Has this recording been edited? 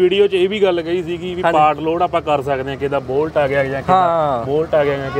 no; 0 cuts

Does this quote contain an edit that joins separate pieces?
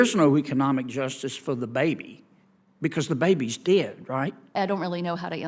yes; 1 cut; at 4.4 s

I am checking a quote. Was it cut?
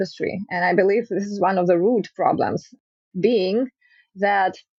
no; 0 cuts

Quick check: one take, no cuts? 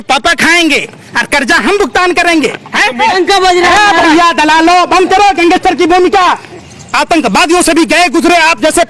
no; 2 cuts; at 3.0 s, 6.5 s

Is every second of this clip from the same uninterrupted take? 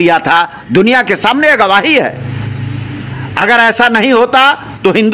yes; 0 cuts

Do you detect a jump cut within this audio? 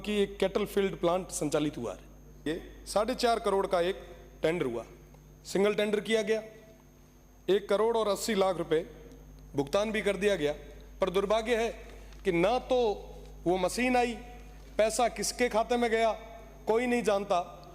yes; 1 cut; at 2.5 s

